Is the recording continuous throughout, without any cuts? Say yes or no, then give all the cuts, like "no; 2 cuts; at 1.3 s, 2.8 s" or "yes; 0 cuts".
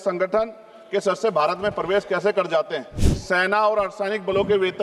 no; 1 cut; at 3.1 s